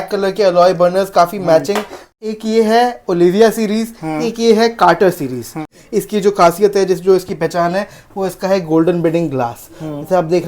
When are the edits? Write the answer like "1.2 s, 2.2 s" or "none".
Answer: 2.1 s, 5.8 s